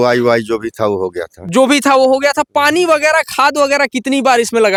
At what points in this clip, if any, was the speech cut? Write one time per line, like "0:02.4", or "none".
none